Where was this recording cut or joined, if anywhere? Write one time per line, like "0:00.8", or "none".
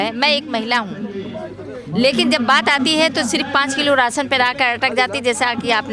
none